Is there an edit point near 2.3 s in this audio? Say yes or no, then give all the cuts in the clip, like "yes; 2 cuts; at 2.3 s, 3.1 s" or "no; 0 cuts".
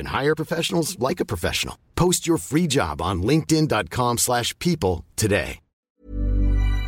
no; 1 cut; at 5.9 s